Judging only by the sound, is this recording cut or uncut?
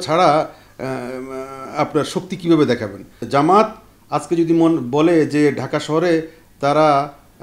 cut